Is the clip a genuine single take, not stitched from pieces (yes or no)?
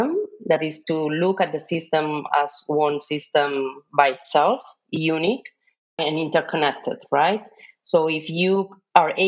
no